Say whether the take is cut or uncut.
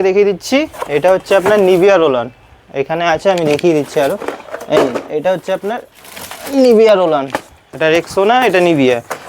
uncut